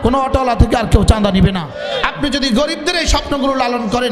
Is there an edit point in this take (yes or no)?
yes